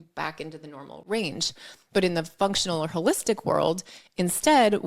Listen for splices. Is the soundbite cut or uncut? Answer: cut